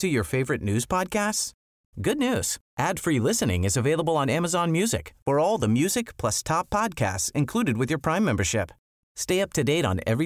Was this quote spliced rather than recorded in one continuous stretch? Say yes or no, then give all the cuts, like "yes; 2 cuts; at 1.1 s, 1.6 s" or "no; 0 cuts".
no; 0 cuts